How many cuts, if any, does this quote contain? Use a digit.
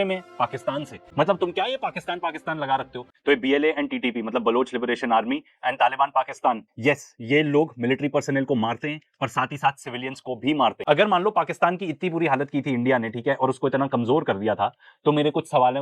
3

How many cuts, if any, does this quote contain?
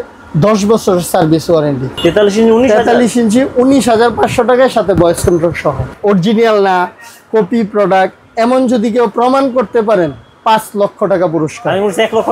2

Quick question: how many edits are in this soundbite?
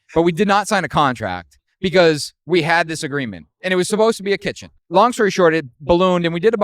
1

